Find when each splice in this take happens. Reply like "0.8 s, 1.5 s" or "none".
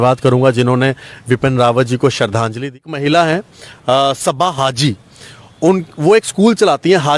2.8 s